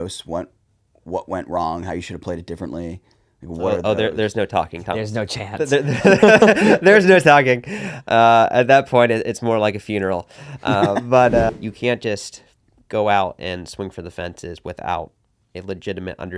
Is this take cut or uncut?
cut